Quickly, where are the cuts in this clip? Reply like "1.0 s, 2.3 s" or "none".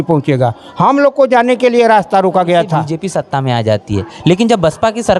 3.0 s